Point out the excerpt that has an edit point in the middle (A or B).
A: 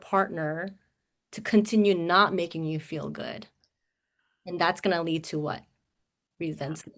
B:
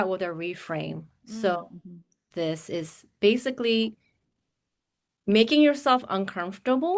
B